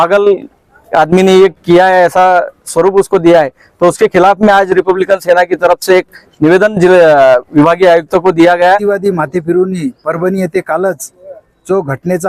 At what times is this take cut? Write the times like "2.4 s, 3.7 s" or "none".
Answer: 8.8 s